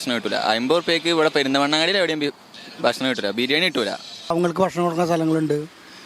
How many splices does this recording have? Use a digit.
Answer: 1